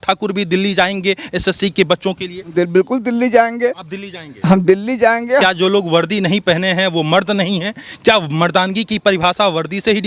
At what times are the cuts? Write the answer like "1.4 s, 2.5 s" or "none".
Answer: 2.5 s, 5.4 s